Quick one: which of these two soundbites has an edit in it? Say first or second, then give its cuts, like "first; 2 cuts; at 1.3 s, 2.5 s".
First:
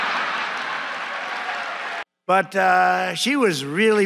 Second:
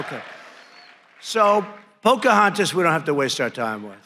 first; 1 cut; at 2.1 s